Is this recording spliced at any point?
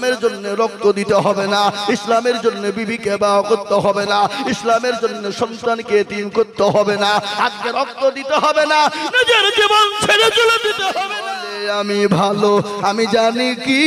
yes; 1 cut; at 11.1 s

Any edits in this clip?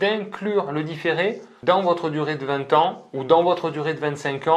no; 0 cuts

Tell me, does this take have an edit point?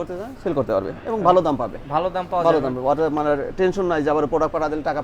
no; 0 cuts

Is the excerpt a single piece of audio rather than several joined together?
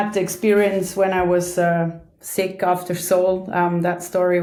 yes; 0 cuts

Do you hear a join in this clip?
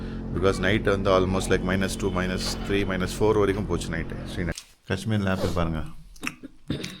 yes; 1 cut; at 4.5 s

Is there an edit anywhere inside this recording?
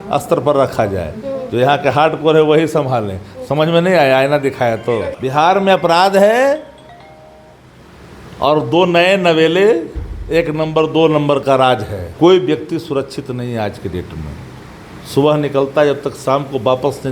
yes; 2 cuts; at 5.1 s, 12.0 s

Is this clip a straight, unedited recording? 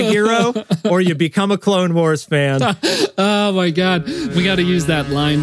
no; 1 cut; at 4.3 s

